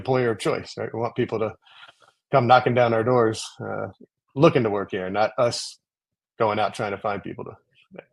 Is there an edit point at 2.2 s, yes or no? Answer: no